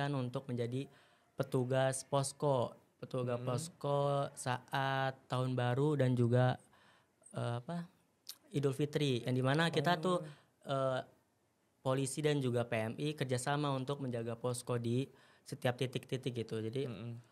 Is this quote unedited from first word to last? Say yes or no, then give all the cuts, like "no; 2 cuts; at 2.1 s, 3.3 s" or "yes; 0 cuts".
yes; 0 cuts